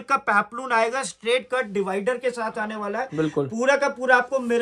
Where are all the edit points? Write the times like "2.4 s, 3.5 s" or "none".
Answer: none

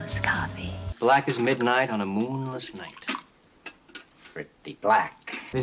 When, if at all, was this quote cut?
none

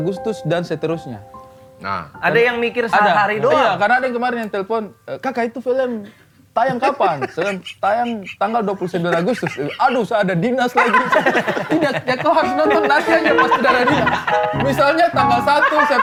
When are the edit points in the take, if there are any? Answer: none

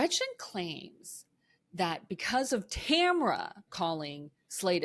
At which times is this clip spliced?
3.7 s

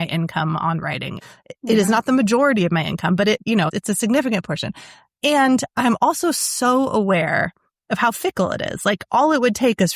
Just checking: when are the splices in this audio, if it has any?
1.1 s, 3.5 s

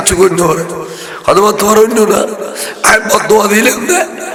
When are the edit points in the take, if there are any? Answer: none

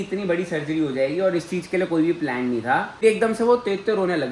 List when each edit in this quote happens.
2.9 s

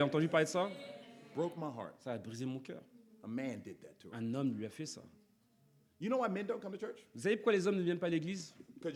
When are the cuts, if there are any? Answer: none

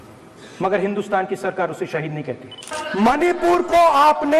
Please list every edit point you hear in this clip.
2.7 s

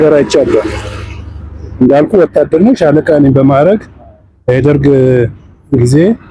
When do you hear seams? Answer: none

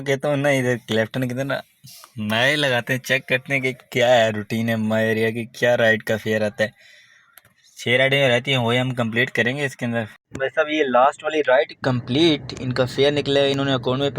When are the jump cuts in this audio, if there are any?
10.2 s

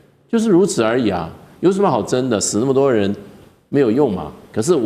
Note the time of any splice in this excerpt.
none

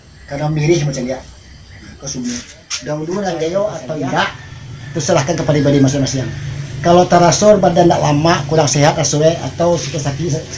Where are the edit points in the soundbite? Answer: 3.5 s

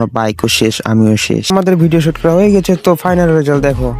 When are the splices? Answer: 1.5 s

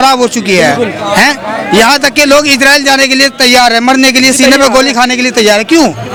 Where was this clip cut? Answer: none

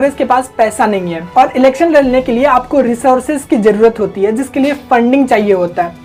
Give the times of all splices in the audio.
none

